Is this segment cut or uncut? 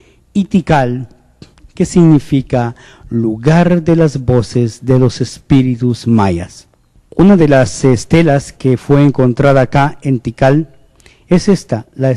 uncut